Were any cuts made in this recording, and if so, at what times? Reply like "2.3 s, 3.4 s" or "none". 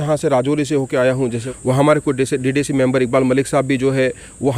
1.4 s